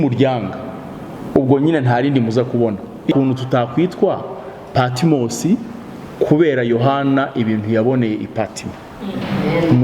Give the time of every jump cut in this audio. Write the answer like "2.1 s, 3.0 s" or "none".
3.1 s